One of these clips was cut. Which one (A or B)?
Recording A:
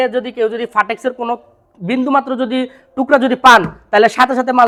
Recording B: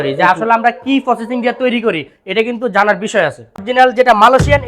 B